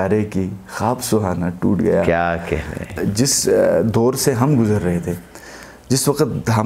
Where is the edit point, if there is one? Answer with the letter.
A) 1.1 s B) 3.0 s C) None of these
B